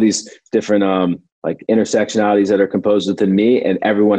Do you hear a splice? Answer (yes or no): yes